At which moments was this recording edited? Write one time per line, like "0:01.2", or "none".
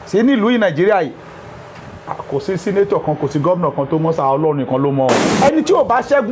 0:05.3